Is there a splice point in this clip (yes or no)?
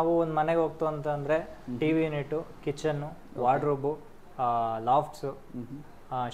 no